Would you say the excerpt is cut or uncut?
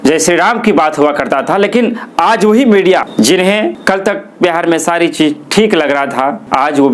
cut